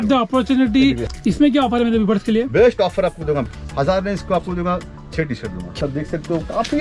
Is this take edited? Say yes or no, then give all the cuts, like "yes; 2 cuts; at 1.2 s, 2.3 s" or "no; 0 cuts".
yes; 3 cuts; at 1.0 s, 3.5 s, 5.1 s